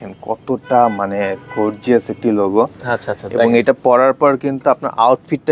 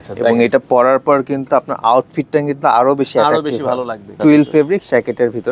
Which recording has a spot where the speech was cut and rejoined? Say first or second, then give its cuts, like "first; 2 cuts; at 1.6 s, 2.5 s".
second; 1 cut; at 4.1 s